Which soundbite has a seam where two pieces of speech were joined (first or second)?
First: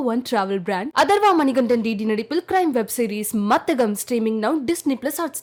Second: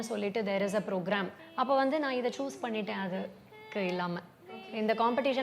second